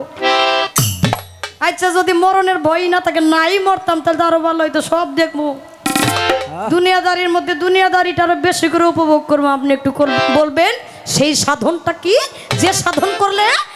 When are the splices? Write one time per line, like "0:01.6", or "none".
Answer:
none